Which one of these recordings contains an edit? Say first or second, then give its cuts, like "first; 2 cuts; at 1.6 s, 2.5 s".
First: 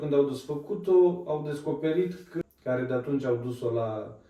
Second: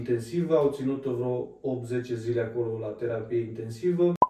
first; 1 cut; at 2.3 s